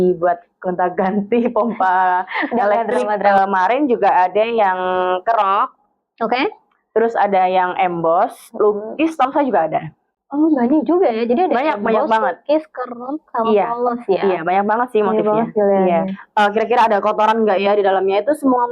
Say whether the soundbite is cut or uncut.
cut